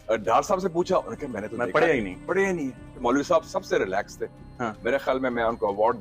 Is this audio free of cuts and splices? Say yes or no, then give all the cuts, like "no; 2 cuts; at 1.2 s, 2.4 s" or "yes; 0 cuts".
no; 1 cut; at 3.0 s